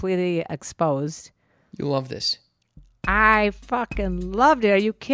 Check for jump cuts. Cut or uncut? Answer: uncut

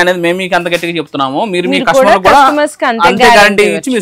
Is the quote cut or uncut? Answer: uncut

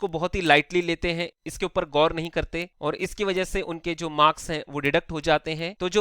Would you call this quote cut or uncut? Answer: uncut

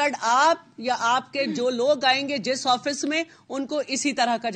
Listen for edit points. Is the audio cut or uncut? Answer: uncut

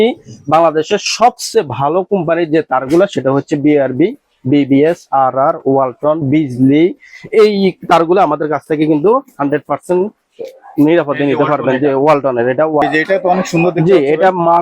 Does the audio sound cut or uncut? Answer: cut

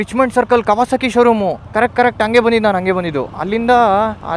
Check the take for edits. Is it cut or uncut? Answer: uncut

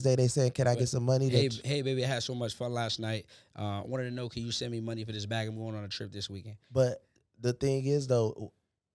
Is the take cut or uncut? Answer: uncut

